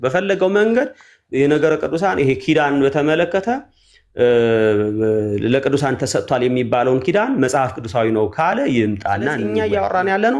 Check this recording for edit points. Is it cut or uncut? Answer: cut